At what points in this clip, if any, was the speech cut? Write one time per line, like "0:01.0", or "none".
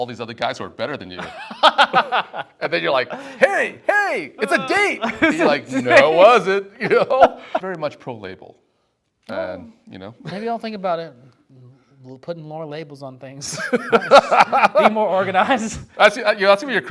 0:07.6